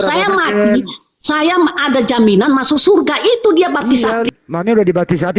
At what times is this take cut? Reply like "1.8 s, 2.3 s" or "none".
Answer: 4.3 s